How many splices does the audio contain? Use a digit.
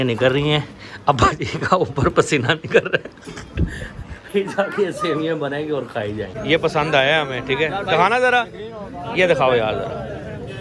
1